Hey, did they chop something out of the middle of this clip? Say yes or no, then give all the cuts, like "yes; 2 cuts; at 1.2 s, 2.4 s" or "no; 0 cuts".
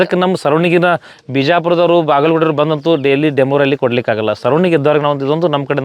no; 0 cuts